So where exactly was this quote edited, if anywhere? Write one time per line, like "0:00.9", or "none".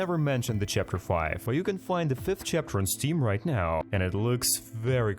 0:01.5

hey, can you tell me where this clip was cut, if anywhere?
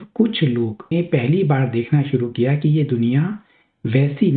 0:00.9

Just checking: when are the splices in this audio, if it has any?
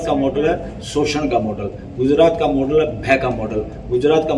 none

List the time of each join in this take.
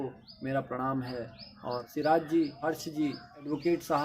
0:01.9
0:03.0

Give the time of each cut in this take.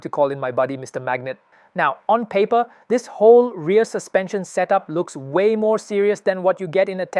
0:01.4

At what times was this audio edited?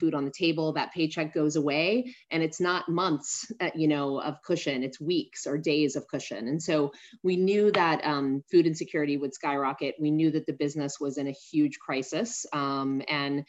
none

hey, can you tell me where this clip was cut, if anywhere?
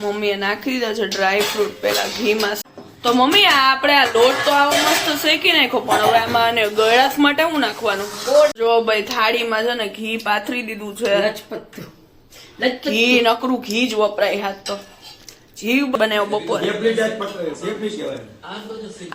0:02.6
0:08.5
0:15.9

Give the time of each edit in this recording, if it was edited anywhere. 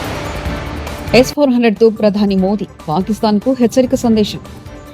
0:01.1

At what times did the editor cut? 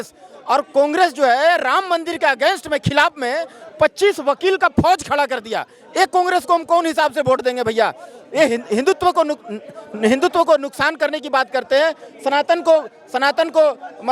none

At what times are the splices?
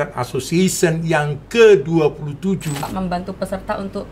0:02.9

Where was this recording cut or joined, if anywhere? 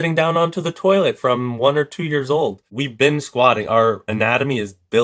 0:02.7

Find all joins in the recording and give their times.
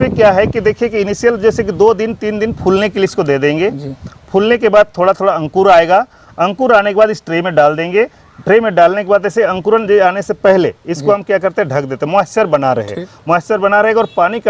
none

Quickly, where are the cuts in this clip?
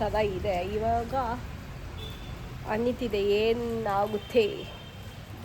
none

